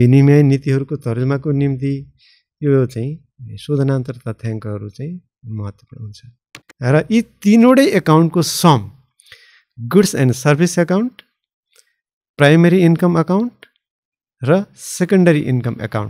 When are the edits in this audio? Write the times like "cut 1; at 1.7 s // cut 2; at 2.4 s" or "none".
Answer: cut 1; at 6.3 s